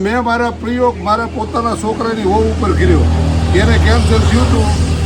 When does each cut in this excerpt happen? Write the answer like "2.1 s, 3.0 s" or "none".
none

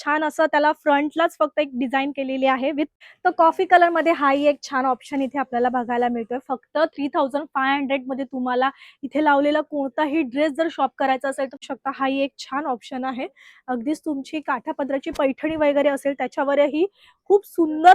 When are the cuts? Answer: 2.9 s, 11.7 s

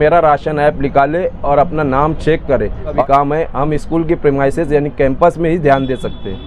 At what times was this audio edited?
3.0 s

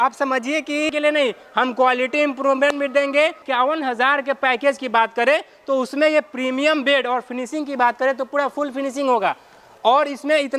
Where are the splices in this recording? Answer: 0.9 s

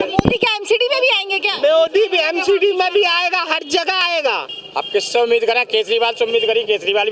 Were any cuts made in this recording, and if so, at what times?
4.1 s

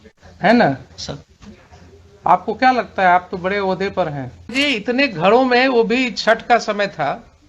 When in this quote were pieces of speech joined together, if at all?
4.5 s

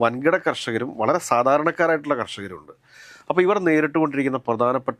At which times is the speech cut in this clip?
none

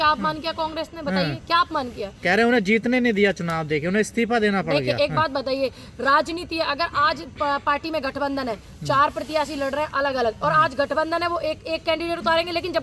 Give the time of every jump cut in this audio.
none

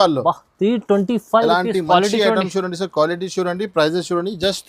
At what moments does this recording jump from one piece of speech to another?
none

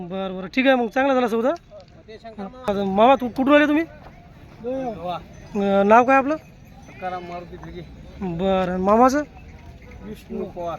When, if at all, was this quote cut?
2.7 s

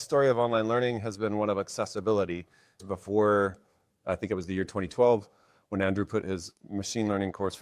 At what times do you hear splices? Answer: 2.8 s

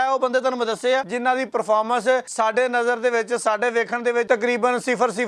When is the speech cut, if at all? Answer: 1.1 s, 2.3 s, 4.3 s

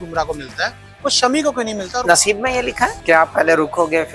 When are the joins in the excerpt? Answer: 1.9 s, 3.0 s

